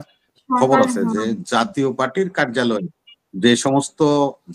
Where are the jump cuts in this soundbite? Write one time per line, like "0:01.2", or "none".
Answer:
none